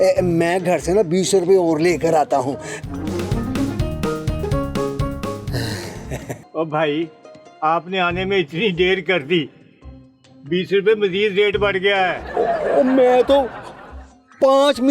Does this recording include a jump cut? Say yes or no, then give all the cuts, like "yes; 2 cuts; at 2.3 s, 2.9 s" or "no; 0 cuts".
yes; 3 cuts; at 2.7 s, 4.4 s, 6.4 s